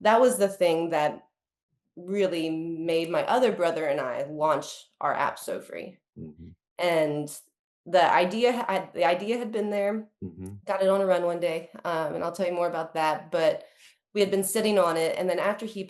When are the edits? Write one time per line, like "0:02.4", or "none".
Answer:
none